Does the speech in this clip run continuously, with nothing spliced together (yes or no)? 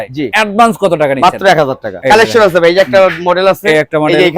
no